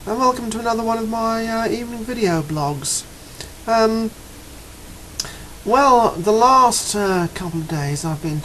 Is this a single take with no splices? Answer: yes; 0 cuts

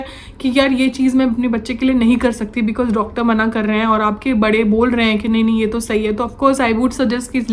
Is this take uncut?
yes; 0 cuts

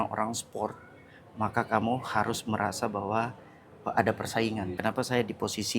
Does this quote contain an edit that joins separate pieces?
yes; 1 cut; at 4.7 s

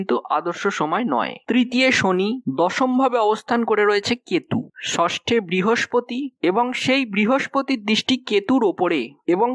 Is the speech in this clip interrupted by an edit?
yes; 1 cut; at 1.4 s

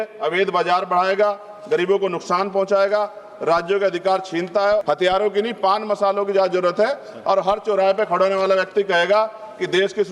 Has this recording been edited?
yes; 1 cut; at 4.8 s

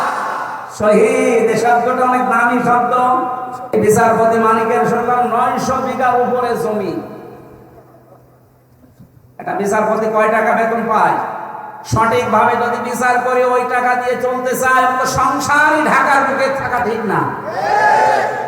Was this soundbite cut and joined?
yes; 1 cut; at 3.7 s

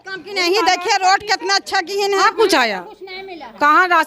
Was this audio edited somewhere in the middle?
yes; 1 cut; at 2.2 s

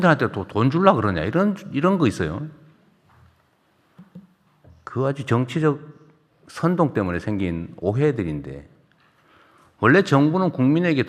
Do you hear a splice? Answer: no; 0 cuts

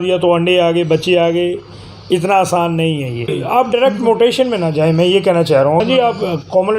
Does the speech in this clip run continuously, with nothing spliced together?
no; 2 cuts; at 3.4 s, 5.8 s

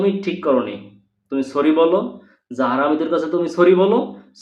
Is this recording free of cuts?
yes; 0 cuts

